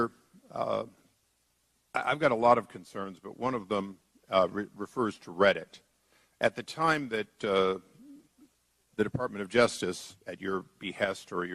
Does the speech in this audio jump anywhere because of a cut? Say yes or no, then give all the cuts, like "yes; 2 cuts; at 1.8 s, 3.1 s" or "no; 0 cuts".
yes; 1 cut; at 2.4 s